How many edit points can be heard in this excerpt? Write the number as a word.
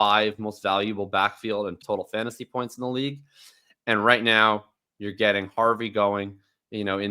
one